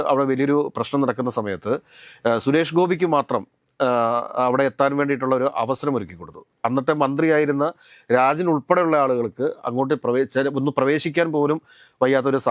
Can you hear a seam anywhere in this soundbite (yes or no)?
no